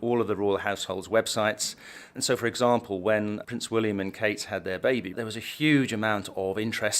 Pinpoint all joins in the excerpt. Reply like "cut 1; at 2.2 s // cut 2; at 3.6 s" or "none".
cut 1; at 5.2 s